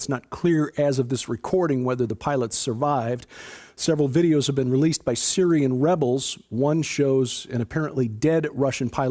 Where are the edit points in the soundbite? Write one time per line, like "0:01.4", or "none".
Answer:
none